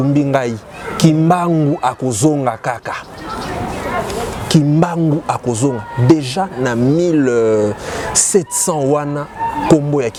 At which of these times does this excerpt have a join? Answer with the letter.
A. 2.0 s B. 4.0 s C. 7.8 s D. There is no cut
D